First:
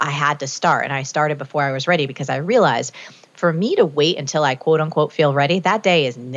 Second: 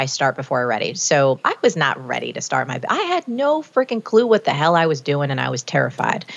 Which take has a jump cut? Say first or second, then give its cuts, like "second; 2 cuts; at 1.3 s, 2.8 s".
second; 1 cut; at 1.4 s